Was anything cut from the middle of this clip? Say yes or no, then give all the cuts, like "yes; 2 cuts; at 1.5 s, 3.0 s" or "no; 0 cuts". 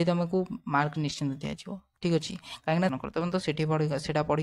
yes; 1 cut; at 2.9 s